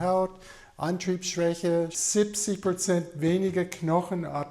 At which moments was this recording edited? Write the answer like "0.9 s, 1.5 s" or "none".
2.0 s